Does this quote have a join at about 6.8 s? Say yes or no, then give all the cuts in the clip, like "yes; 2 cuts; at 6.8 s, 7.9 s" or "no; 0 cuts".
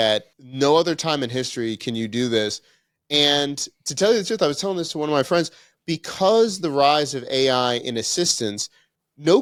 no; 0 cuts